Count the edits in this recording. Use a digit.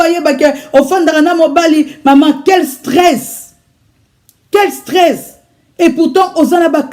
0